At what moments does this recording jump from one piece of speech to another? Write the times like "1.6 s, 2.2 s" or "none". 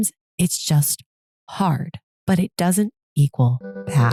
none